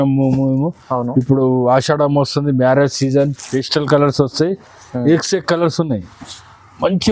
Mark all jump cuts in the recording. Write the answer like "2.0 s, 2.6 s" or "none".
3.4 s